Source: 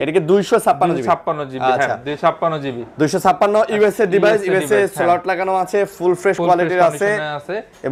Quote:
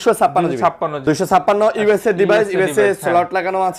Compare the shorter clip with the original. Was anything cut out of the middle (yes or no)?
yes